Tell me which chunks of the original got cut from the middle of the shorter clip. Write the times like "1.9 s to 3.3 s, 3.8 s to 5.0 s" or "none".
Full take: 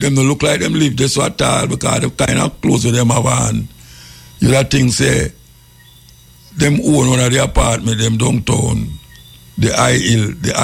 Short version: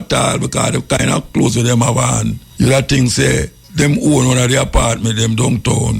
3.7 s to 4.2 s, 5.4 s to 6.4 s